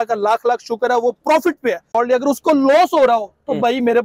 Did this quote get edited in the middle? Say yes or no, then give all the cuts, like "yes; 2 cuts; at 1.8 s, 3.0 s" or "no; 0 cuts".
yes; 1 cut; at 1.8 s